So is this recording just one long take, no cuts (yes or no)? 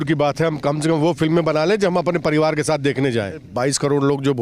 no